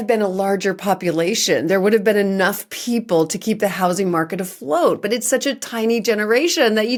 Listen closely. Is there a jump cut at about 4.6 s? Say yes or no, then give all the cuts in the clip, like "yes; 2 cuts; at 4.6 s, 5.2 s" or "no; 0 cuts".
no; 0 cuts